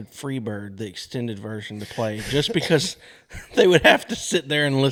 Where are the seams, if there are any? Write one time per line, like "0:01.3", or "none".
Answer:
none